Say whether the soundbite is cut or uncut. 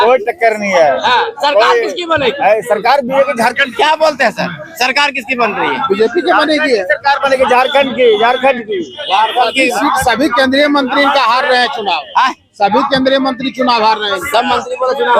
uncut